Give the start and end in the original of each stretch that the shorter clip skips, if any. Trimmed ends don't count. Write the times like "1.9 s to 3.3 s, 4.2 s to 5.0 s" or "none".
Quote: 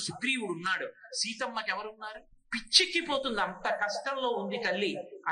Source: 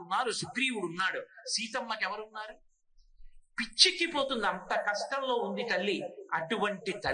2.6 s to 3.4 s